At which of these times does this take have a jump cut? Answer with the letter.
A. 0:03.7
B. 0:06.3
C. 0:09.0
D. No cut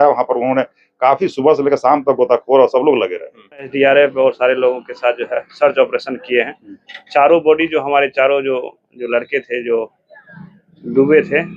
A